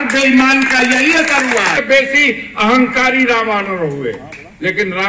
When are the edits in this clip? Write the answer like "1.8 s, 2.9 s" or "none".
1.8 s